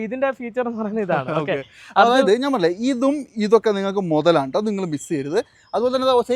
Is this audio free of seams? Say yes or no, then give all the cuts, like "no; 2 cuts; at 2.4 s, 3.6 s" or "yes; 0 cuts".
yes; 0 cuts